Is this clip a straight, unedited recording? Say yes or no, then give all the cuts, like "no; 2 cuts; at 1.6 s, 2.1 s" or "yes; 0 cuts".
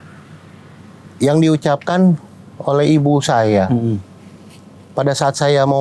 yes; 0 cuts